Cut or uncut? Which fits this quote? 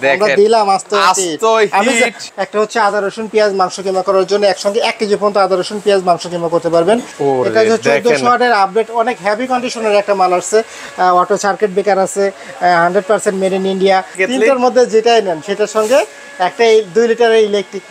cut